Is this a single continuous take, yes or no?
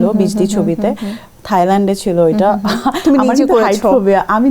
yes